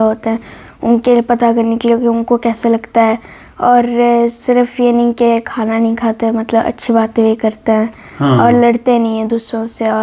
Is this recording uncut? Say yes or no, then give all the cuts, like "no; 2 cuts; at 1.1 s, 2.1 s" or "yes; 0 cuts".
yes; 0 cuts